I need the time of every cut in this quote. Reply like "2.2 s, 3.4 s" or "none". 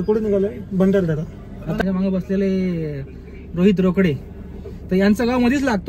1.8 s

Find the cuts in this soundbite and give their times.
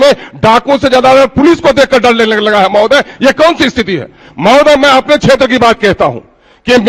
none

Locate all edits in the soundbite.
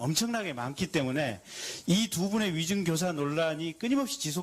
1.6 s

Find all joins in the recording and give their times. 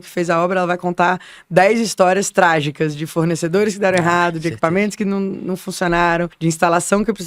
6.3 s

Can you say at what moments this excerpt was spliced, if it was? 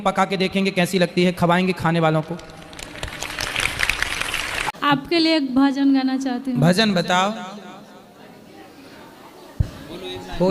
4.7 s

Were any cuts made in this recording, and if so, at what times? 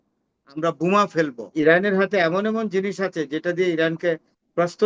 1.4 s

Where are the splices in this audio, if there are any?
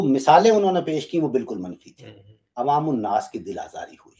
2.4 s

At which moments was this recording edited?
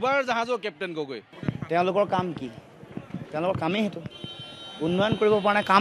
1.3 s

